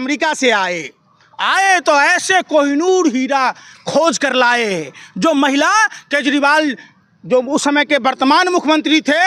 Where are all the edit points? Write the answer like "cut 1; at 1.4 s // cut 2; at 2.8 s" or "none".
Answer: none